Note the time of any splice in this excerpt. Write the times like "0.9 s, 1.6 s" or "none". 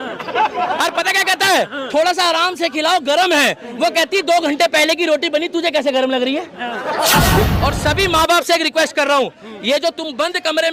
7.5 s

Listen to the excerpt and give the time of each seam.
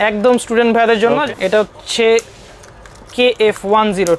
1.2 s

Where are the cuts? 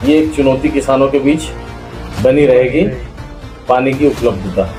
none

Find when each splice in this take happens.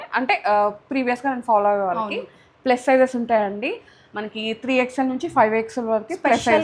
none

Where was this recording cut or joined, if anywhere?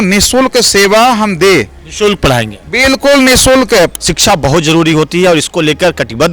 3.9 s

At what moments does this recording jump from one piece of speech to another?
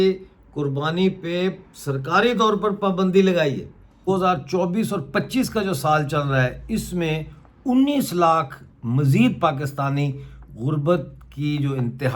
4.1 s

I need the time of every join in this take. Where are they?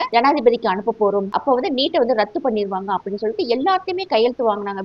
1.3 s

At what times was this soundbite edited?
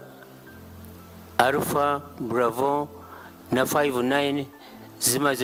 none

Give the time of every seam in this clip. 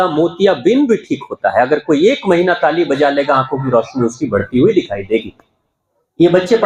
none

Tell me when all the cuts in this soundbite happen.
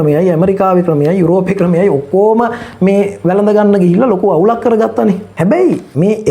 5.3 s

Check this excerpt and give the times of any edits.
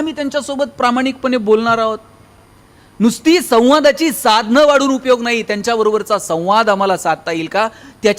none

